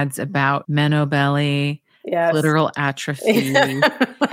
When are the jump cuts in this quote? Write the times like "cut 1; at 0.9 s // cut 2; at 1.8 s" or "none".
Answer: none